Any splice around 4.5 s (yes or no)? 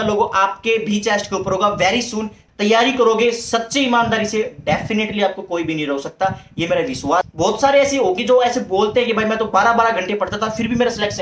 no